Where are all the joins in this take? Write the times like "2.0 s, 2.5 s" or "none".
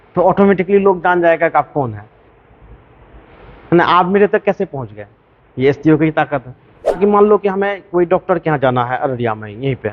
7.0 s

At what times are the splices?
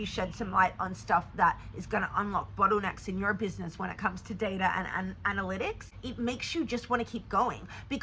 6.0 s

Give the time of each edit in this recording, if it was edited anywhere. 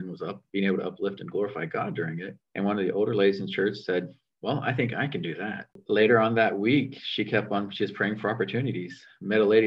2.4 s, 4.2 s, 5.8 s

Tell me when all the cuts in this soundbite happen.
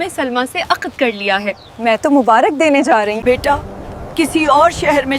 3.2 s

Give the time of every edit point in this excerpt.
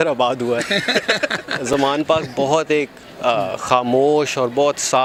none

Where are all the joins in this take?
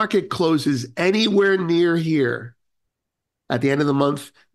none

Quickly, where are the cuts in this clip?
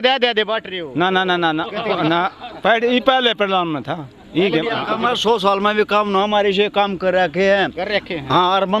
4.8 s

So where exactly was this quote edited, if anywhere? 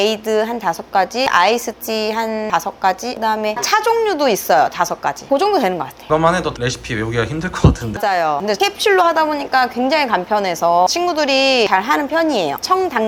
none

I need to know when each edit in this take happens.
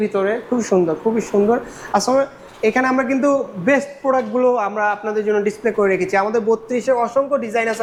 none

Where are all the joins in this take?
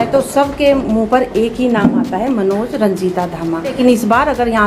3.8 s

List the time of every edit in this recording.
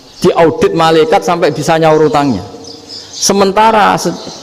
none

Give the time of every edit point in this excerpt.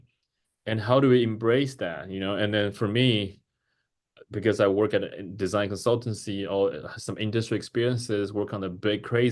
none

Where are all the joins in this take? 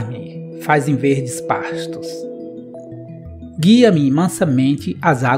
2.0 s, 3.5 s

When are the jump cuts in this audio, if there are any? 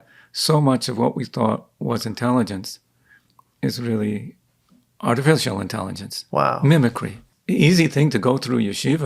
7.3 s

